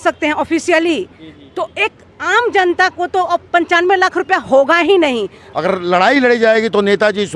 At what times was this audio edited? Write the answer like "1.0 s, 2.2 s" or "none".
5.4 s